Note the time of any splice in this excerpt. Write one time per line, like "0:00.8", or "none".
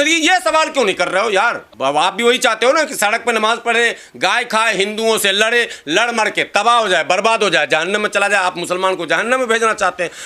0:01.7